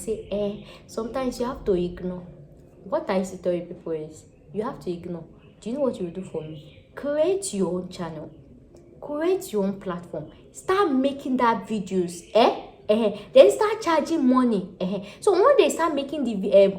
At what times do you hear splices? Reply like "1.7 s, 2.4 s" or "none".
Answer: none